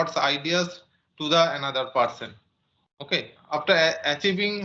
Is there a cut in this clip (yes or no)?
yes